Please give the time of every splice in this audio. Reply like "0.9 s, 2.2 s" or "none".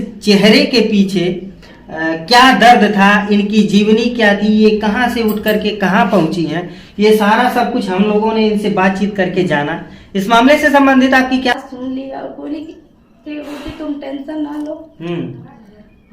11.5 s